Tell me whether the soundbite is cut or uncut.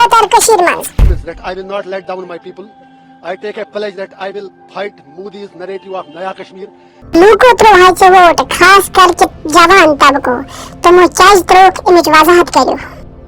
cut